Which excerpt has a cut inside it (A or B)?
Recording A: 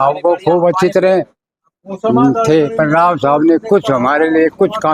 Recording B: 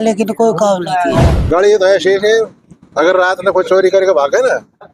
B